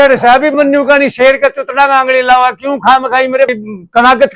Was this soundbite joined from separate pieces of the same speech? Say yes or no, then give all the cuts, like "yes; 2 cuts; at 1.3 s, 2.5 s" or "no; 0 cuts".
no; 0 cuts